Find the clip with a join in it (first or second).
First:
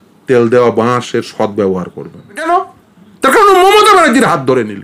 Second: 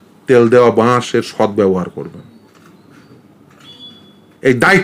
first